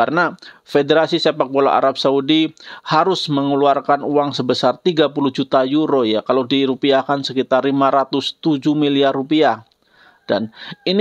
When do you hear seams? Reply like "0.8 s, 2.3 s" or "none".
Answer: none